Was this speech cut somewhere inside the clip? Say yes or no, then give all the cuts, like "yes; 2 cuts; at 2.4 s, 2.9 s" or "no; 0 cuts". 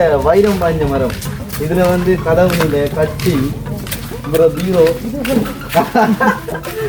no; 0 cuts